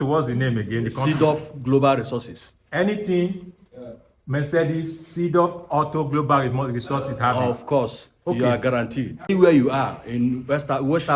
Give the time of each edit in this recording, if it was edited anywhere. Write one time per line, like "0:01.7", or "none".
0:09.3